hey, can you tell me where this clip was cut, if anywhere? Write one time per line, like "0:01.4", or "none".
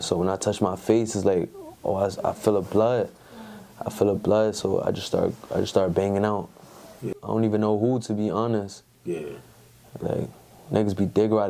0:07.0